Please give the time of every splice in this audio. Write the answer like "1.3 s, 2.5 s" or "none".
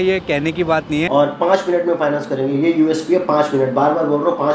1.1 s

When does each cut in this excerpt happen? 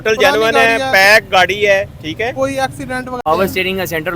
3.2 s

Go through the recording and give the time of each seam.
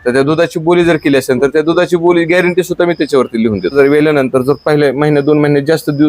3.6 s

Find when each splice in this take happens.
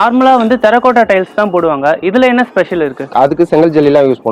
3.0 s

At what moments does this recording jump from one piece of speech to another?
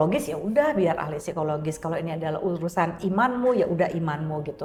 none

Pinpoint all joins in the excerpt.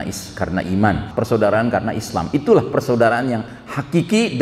1.1 s

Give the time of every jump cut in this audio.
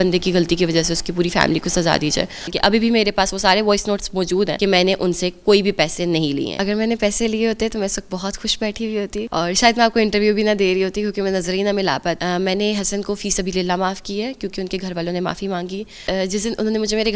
2.5 s, 4.5 s, 6.5 s, 9.3 s, 12.2 s, 16.0 s

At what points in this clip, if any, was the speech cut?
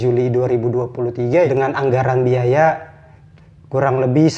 1.5 s

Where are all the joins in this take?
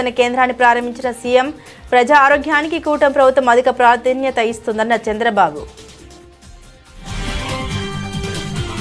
none

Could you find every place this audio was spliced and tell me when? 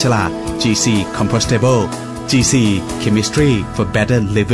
none

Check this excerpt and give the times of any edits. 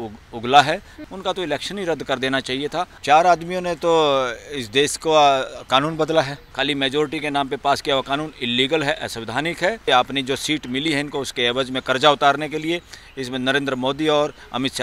0.9 s, 2.9 s, 6.4 s, 9.9 s

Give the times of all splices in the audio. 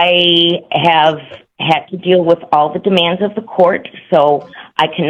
none

